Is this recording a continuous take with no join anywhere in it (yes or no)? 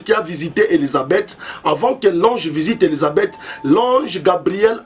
yes